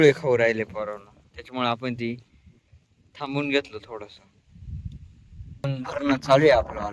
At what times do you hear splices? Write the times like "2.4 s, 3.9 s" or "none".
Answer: 5.6 s

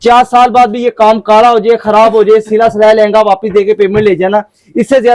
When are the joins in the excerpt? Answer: none

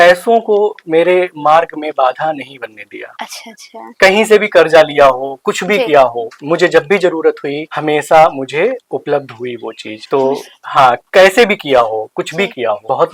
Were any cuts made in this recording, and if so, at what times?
none

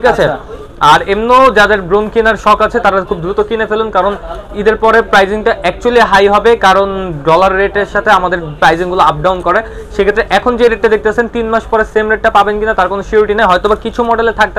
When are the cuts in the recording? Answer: none

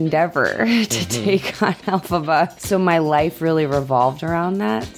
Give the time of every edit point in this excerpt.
2.6 s

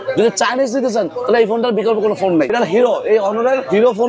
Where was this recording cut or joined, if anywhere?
2.5 s

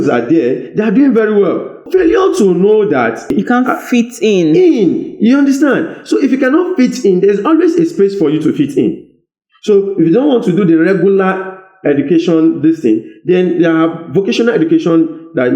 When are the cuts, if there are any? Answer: 1.8 s, 3.3 s

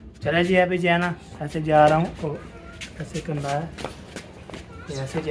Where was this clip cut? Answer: none

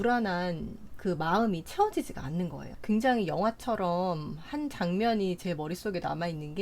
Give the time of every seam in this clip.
2.7 s

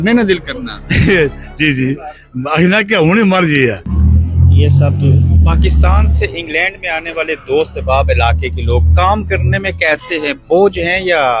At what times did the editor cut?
3.9 s

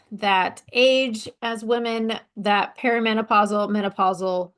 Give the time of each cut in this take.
1.3 s

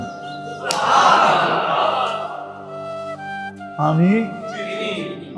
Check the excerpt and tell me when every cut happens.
2.3 s, 3.8 s

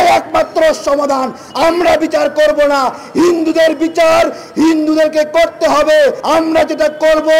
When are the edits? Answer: 6.2 s

